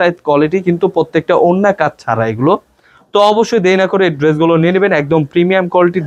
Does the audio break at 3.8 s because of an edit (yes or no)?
no